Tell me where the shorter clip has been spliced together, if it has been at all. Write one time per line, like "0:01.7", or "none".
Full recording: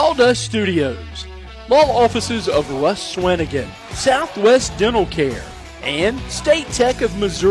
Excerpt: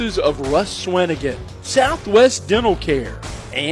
none